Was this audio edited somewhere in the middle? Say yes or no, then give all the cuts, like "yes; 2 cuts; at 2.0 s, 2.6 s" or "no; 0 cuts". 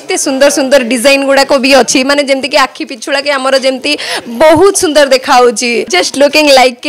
yes; 1 cut; at 6.0 s